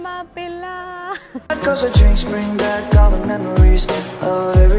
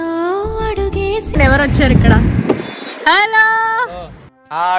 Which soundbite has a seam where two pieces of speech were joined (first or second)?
second